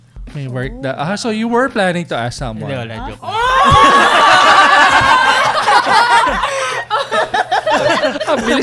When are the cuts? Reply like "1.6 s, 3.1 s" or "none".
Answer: none